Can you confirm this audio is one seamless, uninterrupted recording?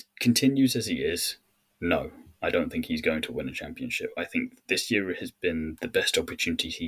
yes; 0 cuts

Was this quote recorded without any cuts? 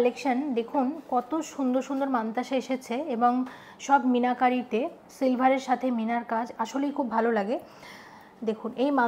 yes; 0 cuts

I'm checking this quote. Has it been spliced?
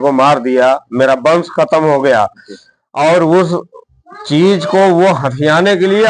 no; 0 cuts

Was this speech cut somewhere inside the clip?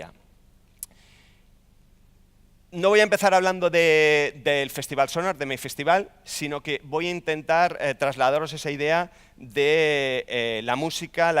yes; 1 cut; at 3.2 s

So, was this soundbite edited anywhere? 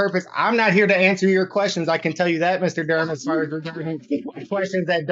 no; 0 cuts

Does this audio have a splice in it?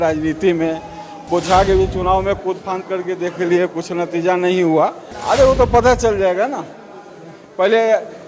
yes; 1 cut; at 5.1 s

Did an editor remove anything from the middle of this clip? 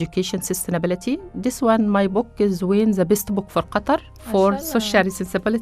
yes; 1 cut; at 4.1 s

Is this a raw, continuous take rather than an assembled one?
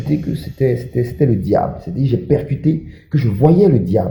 yes; 0 cuts

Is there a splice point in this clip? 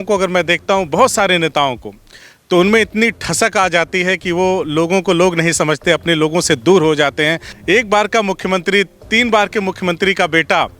yes; 1 cut; at 7.5 s

